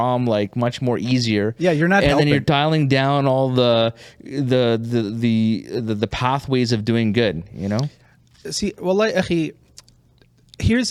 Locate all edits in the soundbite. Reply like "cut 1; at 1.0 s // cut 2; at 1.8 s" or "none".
none

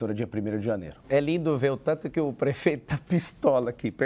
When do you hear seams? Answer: cut 1; at 0.9 s

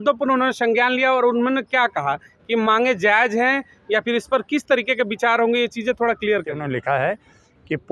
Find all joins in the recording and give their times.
cut 1; at 6.6 s

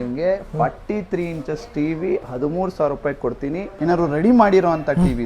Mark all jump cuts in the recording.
cut 1; at 3.7 s

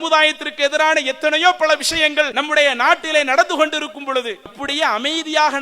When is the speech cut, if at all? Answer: cut 1; at 2.4 s // cut 2; at 4.6 s

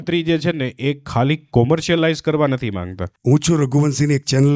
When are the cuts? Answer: cut 1; at 3.1 s

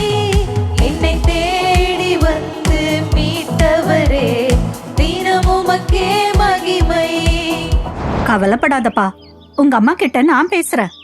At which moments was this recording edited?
cut 1; at 7.9 s

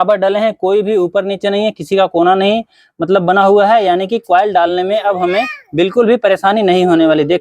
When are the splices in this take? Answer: none

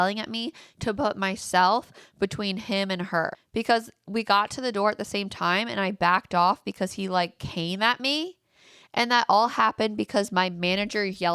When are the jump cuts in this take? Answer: cut 1; at 3.4 s

